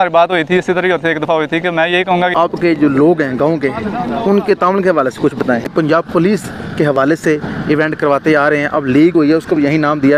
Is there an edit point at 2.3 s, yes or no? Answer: yes